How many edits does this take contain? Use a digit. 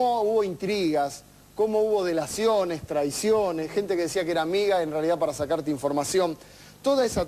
1